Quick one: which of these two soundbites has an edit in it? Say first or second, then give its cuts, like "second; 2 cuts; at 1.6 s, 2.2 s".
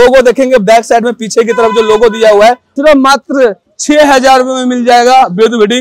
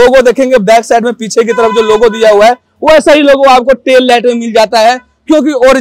first; 1 cut; at 2.7 s